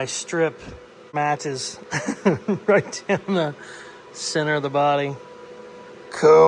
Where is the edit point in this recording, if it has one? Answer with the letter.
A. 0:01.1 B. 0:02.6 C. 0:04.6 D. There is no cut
A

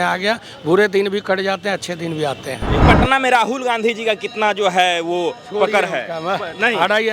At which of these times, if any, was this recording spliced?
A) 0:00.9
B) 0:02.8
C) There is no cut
B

